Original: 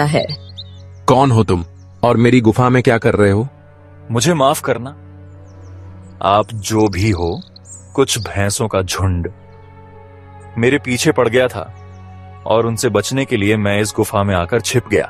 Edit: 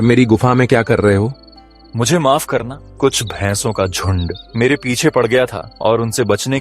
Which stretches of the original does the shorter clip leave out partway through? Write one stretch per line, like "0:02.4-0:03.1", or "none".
0:05.0-0:07.8
0:09.3-0:10.4
0:11.7-0:12.3